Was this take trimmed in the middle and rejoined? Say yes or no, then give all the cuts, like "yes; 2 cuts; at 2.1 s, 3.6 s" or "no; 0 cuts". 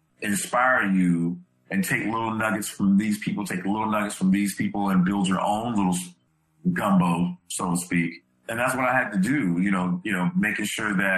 yes; 1 cut; at 8.5 s